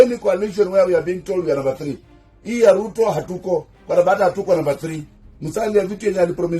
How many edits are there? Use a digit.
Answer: 1